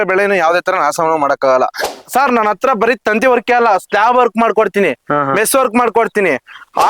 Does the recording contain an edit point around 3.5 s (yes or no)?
no